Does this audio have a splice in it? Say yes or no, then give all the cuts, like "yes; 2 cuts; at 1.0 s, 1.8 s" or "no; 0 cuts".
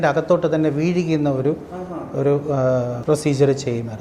yes; 1 cut; at 3.0 s